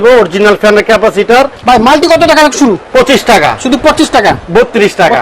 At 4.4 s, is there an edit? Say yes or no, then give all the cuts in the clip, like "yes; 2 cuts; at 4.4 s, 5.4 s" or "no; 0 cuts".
yes; 3 cuts; at 1.6 s, 2.8 s, 4.4 s